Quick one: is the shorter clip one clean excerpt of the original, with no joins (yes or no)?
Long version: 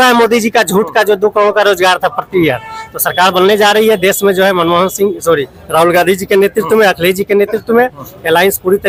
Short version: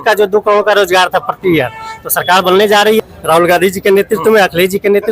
no